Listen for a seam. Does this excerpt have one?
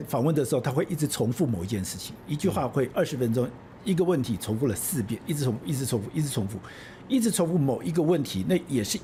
no; 0 cuts

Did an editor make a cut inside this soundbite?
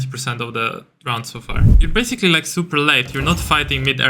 yes; 1 cut; at 1.8 s

